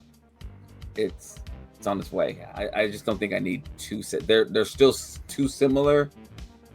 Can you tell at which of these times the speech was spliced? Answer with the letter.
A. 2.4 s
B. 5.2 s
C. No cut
A